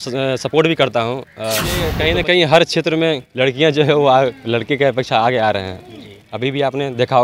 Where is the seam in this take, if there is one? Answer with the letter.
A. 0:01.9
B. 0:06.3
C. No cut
A